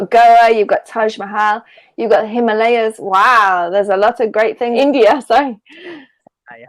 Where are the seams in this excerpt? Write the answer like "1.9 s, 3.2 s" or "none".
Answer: 4.7 s